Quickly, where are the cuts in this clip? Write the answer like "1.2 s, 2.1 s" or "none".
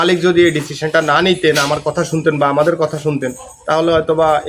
none